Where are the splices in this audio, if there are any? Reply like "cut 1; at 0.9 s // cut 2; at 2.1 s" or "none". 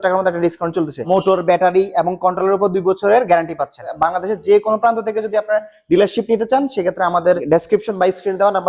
cut 1; at 1.0 s // cut 2; at 3.8 s // cut 3; at 7.4 s